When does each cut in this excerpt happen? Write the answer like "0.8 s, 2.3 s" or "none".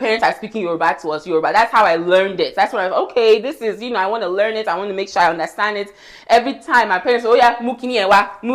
none

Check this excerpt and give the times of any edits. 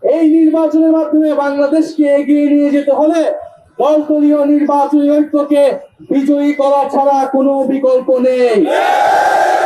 none

